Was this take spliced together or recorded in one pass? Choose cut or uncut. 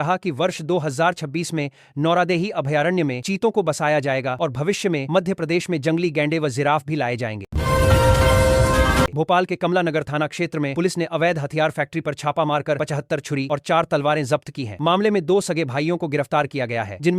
cut